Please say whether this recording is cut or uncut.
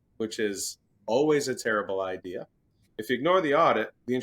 cut